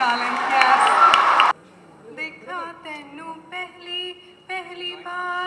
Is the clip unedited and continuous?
no; 1 cut; at 1.5 s

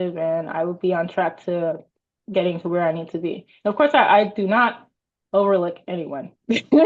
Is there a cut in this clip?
no; 0 cuts

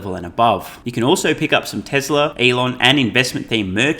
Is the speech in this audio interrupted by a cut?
yes; 2 cuts; at 0.8 s, 2.3 s

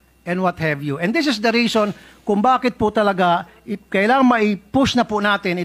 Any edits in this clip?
no; 0 cuts

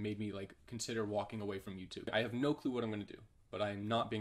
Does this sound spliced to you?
yes; 1 cut; at 2.1 s

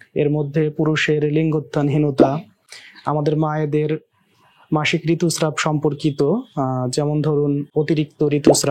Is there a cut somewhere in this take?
no; 0 cuts

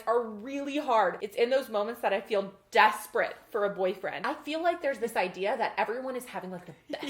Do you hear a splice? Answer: yes; 2 cuts; at 1.2 s, 4.2 s

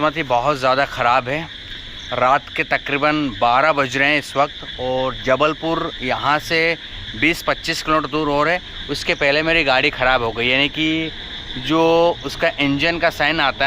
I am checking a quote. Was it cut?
no; 0 cuts

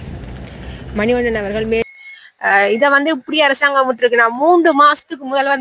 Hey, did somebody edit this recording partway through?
yes; 1 cut; at 1.8 s

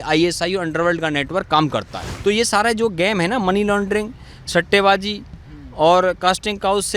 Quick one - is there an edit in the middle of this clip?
yes; 1 cut; at 2.0 s

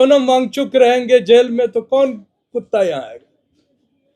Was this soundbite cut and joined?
no; 0 cuts

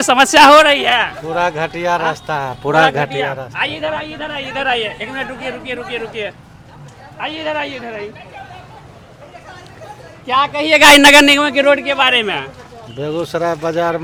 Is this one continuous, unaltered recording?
yes; 0 cuts

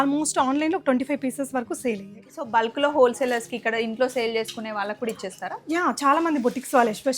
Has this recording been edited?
yes; 1 cut; at 2.3 s

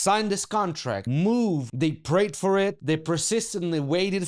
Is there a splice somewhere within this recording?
yes; 3 cuts; at 1.1 s, 1.6 s, 2.8 s

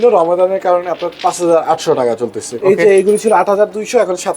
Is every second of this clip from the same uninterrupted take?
no; 1 cut; at 2.5 s

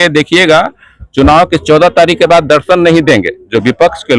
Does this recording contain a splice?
no; 0 cuts

